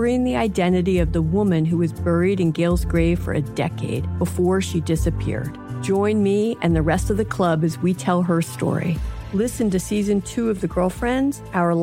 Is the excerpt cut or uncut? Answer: uncut